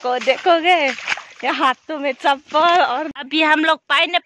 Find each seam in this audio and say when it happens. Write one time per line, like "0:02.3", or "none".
0:03.1